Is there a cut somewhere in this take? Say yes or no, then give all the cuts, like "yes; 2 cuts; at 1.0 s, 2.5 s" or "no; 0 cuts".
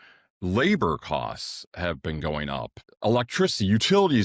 yes; 1 cut; at 3.1 s